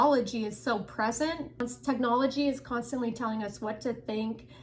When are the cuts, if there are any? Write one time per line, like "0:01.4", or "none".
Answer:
0:01.6